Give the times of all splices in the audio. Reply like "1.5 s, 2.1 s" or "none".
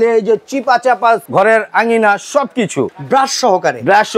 1.2 s, 2.9 s